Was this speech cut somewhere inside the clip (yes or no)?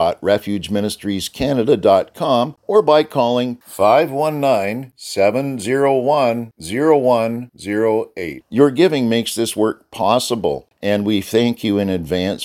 yes